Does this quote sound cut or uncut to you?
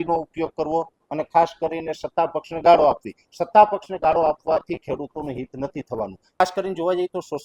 cut